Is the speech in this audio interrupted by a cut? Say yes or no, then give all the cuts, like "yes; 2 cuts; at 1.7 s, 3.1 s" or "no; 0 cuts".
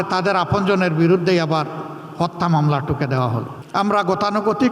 yes; 1 cut; at 3.6 s